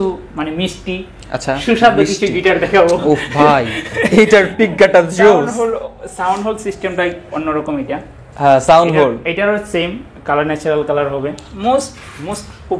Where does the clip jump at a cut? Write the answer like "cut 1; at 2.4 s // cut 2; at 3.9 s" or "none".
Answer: cut 1; at 11.5 s